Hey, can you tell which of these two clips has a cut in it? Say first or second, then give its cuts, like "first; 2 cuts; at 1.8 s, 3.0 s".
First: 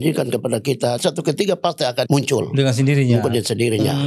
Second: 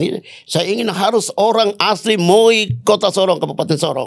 first; 2 cuts; at 1.0 s, 2.1 s